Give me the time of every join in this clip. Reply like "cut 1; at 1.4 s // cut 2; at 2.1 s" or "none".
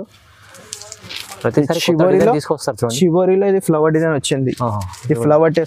none